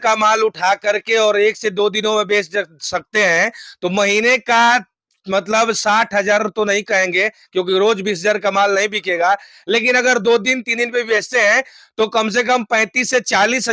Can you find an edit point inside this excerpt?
no; 0 cuts

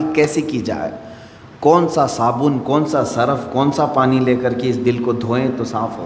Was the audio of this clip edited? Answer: no; 0 cuts

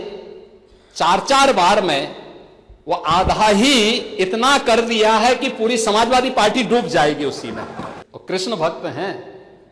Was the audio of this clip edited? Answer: yes; 1 cut; at 7.9 s

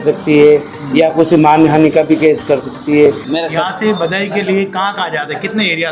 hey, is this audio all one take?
no; 1 cut; at 3.2 s

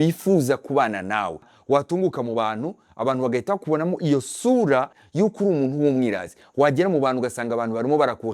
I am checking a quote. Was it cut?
yes; 2 cuts; at 1.5 s, 5.0 s

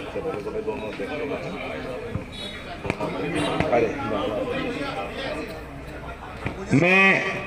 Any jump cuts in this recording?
no; 0 cuts

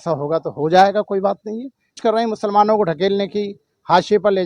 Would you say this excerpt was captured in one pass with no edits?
no; 1 cut; at 2.0 s

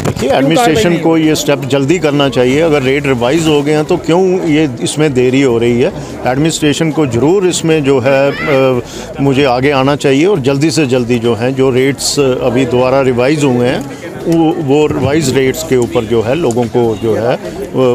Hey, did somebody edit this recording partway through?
no; 0 cuts

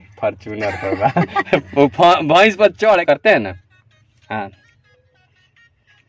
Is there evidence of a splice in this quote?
yes; 1 cut; at 3.0 s

